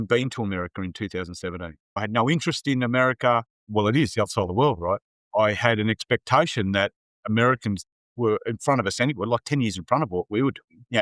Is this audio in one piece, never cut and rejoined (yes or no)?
no